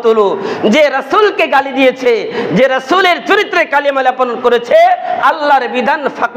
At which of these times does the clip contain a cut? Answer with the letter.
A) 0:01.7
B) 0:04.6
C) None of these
C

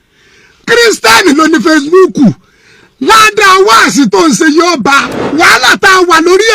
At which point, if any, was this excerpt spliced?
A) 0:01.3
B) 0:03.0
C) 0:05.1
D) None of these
C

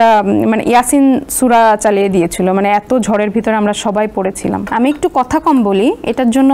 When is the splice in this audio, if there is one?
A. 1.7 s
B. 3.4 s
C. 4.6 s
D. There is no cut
C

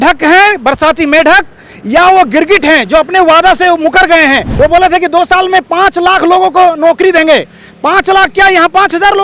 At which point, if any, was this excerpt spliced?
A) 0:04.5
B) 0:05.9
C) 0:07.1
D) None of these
A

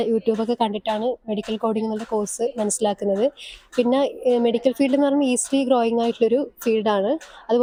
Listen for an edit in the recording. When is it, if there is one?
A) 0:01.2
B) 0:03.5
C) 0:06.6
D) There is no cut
D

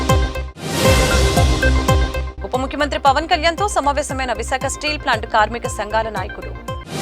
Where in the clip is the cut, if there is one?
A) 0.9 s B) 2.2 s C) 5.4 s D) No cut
B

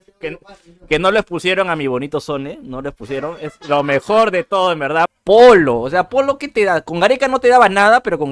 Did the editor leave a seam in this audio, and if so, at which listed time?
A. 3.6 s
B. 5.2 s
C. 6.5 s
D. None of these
B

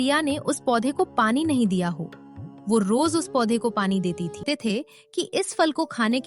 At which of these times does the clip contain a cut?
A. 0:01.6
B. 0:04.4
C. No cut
B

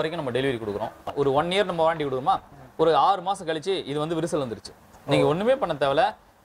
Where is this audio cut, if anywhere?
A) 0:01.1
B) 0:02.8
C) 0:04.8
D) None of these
A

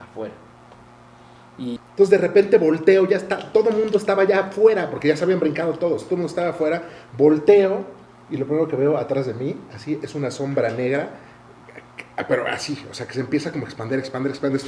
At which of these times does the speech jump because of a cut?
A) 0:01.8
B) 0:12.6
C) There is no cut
A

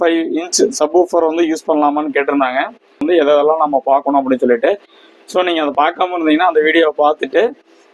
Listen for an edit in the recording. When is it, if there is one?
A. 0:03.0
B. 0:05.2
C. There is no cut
A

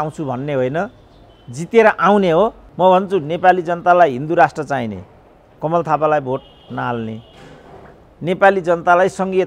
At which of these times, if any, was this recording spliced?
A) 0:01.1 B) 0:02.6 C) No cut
B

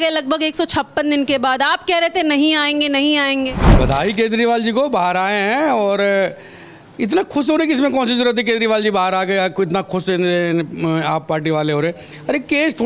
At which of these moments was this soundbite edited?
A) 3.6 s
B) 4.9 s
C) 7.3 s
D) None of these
A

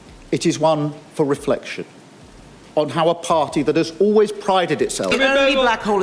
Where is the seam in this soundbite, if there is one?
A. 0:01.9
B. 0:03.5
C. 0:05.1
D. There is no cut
C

